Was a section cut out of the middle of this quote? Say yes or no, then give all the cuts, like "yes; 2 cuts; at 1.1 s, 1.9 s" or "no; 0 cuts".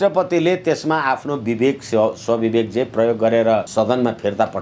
yes; 1 cut; at 3.7 s